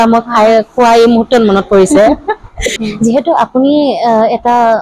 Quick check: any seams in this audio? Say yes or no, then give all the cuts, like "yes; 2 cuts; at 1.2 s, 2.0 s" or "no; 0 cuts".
yes; 1 cut; at 2.8 s